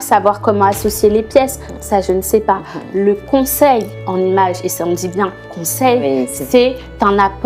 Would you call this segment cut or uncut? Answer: uncut